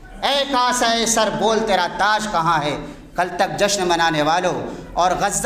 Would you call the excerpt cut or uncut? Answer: uncut